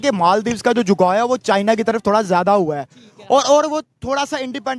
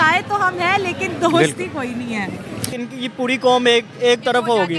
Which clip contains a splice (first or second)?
second